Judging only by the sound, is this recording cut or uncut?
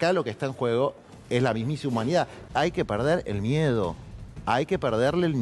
cut